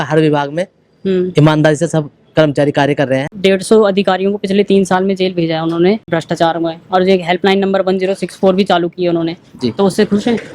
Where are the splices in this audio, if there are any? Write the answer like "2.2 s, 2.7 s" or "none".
3.3 s, 6.1 s